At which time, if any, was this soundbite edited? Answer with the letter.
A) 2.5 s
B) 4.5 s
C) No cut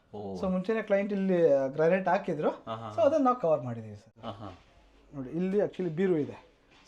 B